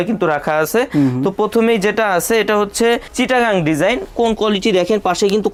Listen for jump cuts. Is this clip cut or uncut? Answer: uncut